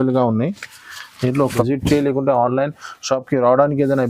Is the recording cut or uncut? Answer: cut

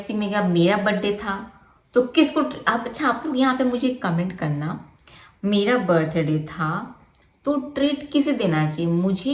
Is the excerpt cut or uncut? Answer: uncut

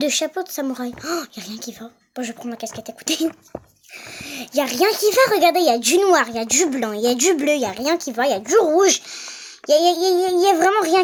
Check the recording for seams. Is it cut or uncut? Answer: uncut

